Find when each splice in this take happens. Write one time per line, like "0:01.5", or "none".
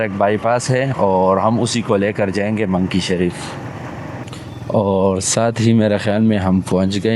0:04.2